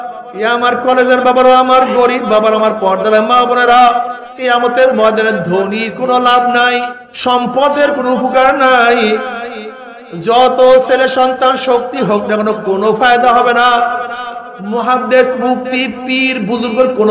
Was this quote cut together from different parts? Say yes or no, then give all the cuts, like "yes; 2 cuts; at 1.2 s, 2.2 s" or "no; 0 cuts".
yes; 2 cuts; at 4.2 s, 7.0 s